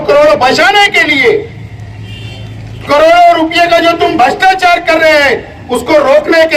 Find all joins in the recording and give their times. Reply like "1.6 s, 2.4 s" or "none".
none